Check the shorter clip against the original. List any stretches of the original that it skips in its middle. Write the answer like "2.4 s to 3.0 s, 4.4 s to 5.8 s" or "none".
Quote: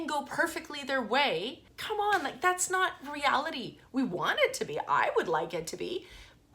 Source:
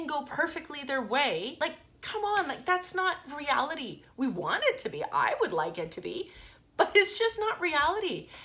1.5 s to 1.8 s